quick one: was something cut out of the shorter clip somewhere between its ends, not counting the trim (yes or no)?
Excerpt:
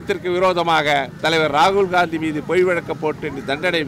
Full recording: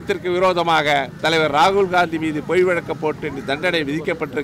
no